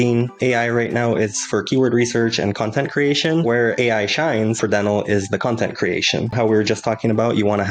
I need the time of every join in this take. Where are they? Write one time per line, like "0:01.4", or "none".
0:03.6
0:04.6
0:06.3